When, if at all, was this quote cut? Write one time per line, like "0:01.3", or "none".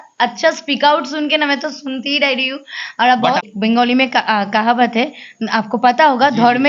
0:03.5